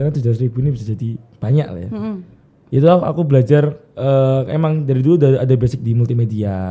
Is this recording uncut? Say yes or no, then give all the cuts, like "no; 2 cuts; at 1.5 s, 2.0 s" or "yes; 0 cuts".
yes; 0 cuts